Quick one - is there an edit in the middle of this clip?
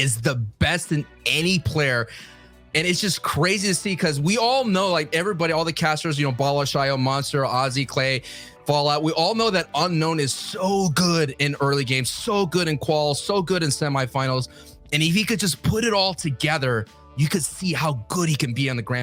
no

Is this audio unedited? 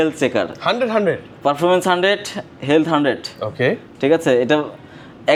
yes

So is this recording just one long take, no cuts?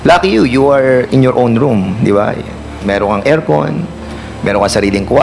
yes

